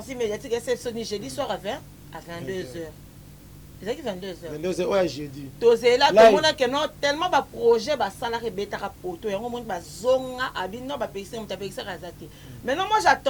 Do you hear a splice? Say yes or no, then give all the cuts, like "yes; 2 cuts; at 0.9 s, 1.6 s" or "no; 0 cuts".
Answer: no; 0 cuts